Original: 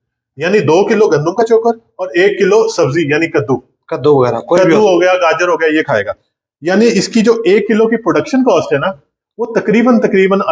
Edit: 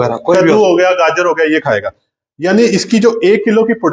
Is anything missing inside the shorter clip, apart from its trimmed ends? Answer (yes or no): no